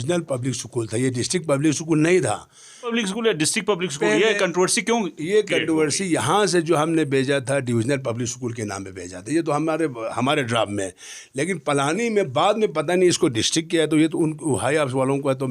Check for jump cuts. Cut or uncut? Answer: cut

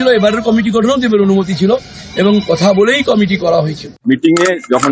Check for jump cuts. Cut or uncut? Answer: cut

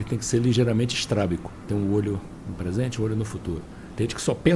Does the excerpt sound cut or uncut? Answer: cut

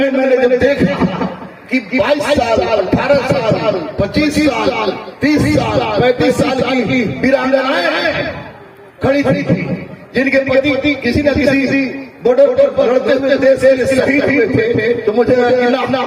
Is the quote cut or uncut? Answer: uncut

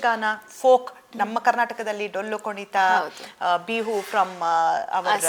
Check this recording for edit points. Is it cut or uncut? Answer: uncut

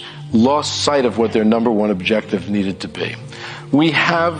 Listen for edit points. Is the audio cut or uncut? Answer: cut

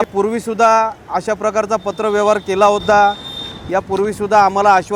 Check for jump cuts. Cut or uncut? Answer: uncut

